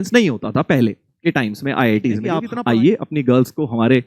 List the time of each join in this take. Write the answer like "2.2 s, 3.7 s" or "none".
2.4 s